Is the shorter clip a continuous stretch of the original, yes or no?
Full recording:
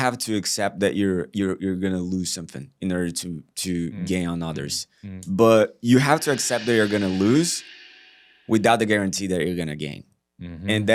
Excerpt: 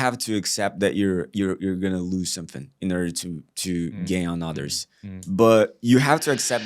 yes